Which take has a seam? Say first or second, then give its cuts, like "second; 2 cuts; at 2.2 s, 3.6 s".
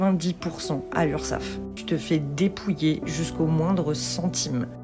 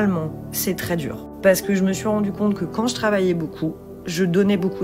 first; 1 cut; at 1.8 s